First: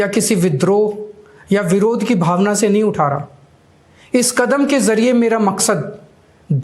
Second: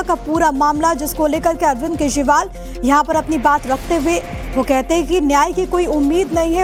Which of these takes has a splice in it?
first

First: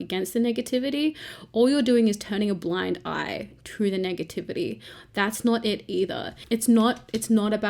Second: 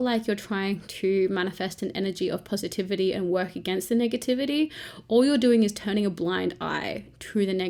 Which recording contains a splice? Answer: first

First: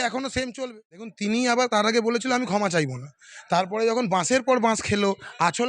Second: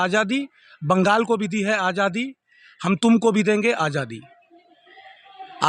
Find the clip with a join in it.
first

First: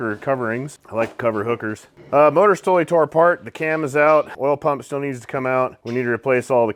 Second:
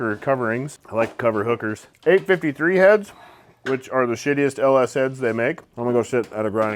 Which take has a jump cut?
second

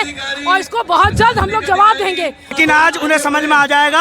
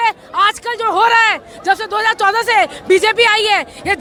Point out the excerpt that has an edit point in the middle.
first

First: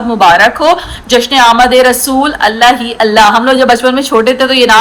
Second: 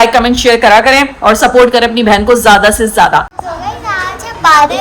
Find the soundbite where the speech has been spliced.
second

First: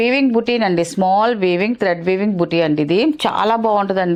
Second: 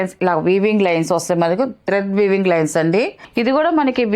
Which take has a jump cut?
second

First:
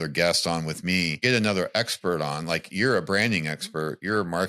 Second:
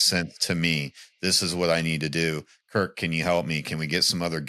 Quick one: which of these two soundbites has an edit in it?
first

